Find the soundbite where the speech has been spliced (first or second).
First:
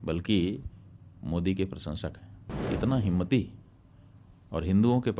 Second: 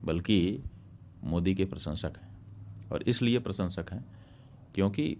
first